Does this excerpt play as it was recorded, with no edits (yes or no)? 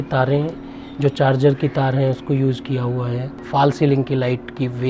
no